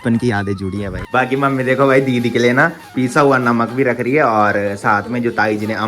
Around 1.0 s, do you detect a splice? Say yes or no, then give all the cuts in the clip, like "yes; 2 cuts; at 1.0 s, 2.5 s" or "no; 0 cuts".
yes; 1 cut; at 1.0 s